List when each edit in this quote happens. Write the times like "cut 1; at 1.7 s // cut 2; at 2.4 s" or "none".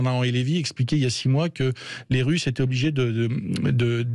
none